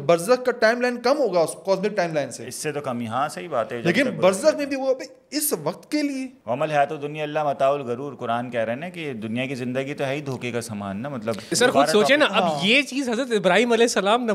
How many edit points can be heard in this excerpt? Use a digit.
2